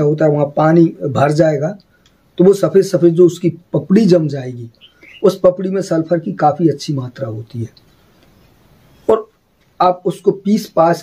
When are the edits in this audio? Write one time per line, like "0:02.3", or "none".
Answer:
none